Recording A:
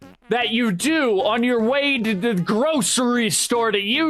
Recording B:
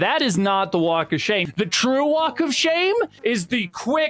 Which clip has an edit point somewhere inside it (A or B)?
B